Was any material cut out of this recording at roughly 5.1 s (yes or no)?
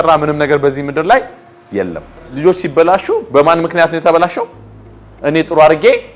no